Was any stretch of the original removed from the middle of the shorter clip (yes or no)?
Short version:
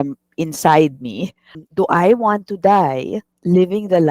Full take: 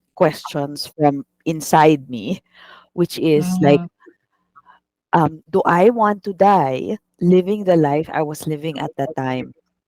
yes